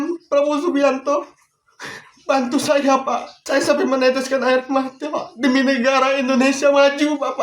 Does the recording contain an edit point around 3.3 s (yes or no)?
yes